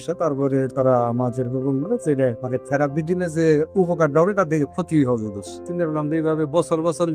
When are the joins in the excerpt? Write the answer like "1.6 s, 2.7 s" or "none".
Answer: 2.4 s, 5.6 s